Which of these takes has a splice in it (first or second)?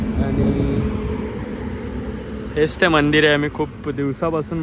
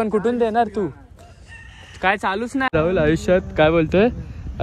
second